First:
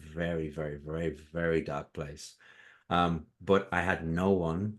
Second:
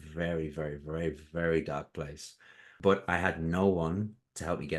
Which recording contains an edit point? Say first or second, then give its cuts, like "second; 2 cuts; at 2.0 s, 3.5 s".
second; 1 cut; at 2.7 s